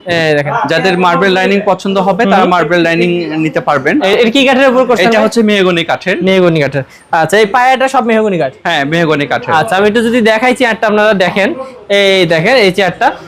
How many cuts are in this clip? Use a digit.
0